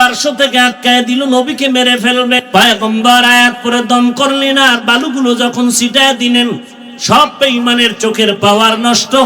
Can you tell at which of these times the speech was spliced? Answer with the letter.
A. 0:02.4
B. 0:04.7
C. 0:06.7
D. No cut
A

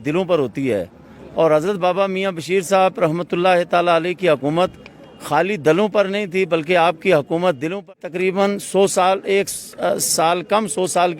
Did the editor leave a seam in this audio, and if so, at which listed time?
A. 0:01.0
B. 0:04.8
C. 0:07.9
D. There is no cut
C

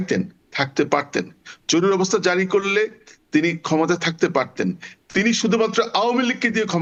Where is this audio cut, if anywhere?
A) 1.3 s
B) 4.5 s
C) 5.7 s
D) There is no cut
D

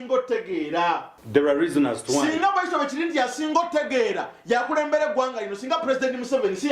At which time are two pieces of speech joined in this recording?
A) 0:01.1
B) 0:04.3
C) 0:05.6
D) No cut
A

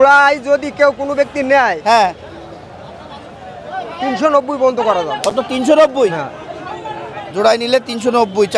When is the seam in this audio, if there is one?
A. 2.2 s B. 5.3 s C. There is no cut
C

